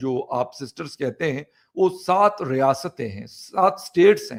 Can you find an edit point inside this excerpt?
no; 0 cuts

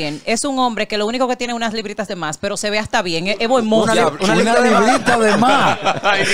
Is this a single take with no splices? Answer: yes; 0 cuts

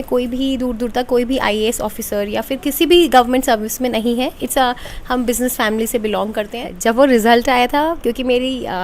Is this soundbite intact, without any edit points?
no; 1 cut; at 6.6 s

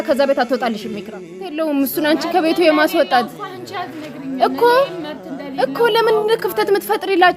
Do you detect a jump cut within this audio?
yes; 1 cut; at 1.5 s

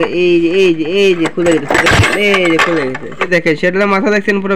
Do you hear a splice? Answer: yes; 1 cut; at 3.3 s

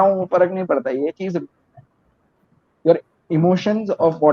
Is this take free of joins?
no; 1 cut; at 2.4 s

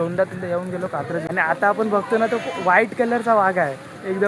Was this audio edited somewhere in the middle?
yes; 1 cut; at 1.2 s

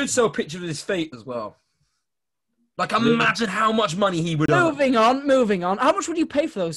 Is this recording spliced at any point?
no; 0 cuts

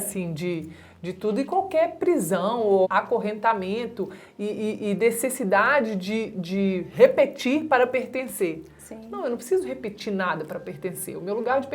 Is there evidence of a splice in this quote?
yes; 1 cut; at 2.9 s

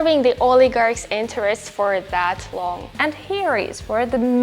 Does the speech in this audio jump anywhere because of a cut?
yes; 1 cut; at 2.9 s

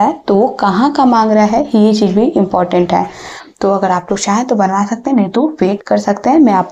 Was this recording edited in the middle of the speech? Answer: no; 0 cuts

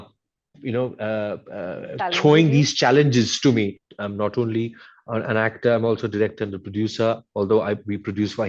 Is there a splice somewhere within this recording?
yes; 1 cut; at 3.9 s

